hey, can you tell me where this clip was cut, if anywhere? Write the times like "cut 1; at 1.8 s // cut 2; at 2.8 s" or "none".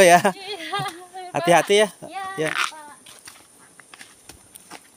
none